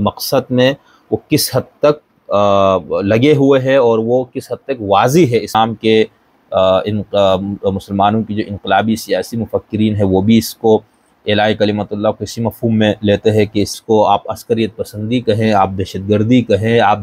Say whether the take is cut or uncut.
cut